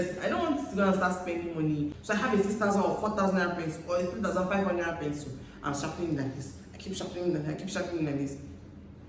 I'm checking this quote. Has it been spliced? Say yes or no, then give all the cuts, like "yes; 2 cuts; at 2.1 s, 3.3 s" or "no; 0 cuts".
yes; 1 cut; at 1.9 s